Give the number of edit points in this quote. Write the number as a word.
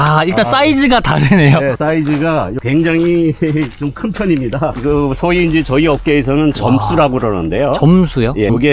zero